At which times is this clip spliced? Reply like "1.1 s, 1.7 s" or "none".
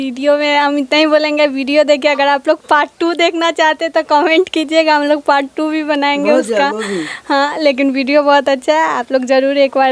none